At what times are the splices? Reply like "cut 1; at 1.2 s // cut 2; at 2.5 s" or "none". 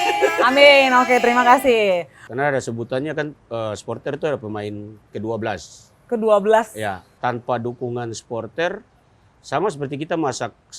cut 1; at 2.2 s // cut 2; at 7.1 s